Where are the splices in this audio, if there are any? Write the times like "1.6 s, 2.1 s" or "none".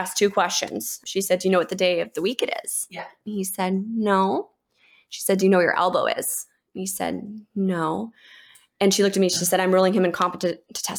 1.0 s